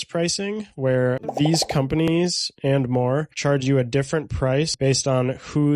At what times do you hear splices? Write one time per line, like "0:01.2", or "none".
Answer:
0:04.7